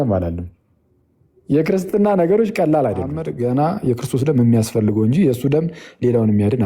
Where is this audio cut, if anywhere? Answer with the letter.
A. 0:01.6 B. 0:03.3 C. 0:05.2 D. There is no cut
B